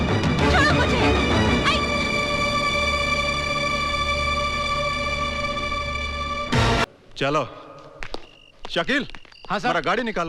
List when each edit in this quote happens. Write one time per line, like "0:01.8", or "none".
0:06.8